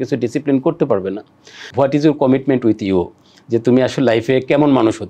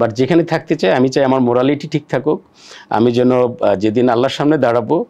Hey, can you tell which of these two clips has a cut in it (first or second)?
first